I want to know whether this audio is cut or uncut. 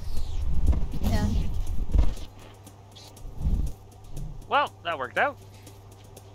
uncut